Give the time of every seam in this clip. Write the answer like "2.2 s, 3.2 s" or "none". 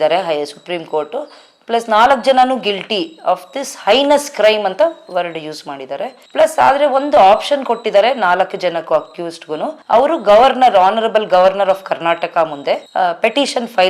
12.9 s